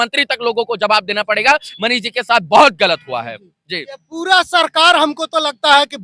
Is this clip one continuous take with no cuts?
yes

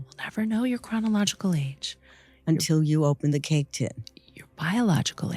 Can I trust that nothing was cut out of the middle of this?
yes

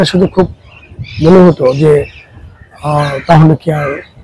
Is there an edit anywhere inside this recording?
no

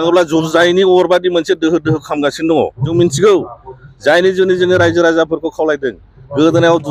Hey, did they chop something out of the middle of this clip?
yes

